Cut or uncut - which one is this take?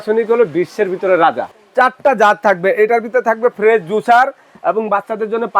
cut